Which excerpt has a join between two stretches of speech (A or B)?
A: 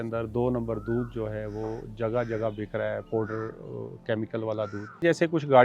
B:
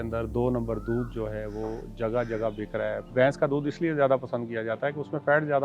B